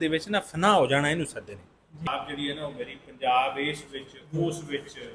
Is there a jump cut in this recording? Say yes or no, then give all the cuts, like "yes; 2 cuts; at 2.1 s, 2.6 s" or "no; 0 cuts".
yes; 1 cut; at 2.0 s